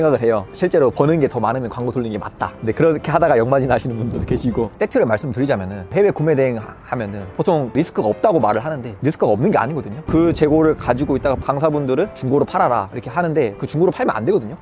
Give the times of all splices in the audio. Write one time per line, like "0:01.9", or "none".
0:04.7
0:10.1
0:11.5
0:13.6